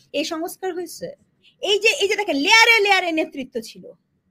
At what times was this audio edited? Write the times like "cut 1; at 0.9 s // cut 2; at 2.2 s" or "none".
cut 1; at 1.5 s